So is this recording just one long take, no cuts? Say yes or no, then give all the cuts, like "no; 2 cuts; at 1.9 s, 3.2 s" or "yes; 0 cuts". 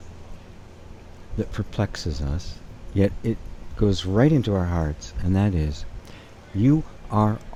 yes; 0 cuts